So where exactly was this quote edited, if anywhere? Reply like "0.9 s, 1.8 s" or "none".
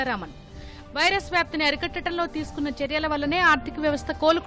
none